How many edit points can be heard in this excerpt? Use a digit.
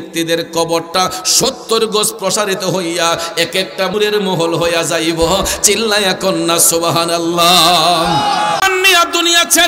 1